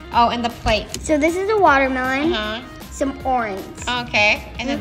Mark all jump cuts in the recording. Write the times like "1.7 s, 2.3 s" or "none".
0.9 s, 2.8 s